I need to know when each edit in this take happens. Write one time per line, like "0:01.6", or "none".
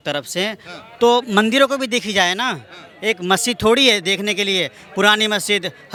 none